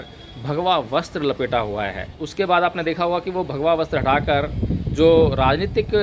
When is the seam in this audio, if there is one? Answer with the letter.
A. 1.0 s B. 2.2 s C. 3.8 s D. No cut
B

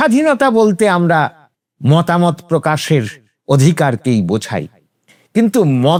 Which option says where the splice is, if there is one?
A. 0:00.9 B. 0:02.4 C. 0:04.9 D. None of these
D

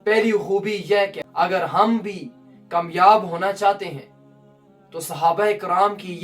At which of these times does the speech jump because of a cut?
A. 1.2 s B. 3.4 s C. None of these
A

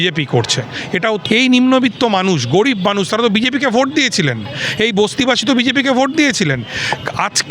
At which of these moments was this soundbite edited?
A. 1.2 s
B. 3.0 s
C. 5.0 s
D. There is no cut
A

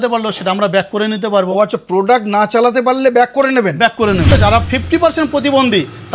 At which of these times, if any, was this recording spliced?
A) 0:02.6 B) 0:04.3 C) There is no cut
B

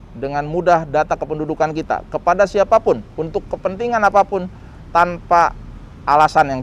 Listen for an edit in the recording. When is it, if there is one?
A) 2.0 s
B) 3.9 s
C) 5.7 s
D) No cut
D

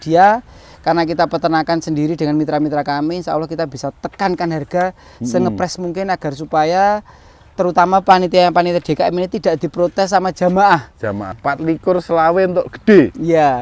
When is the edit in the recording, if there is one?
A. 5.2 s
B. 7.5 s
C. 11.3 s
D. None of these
C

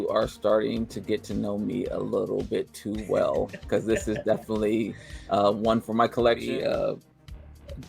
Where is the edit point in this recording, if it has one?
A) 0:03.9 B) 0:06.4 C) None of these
B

